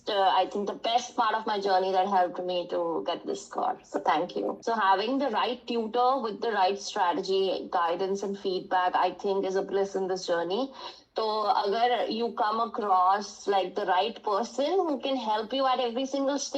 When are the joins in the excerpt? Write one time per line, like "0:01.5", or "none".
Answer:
0:04.6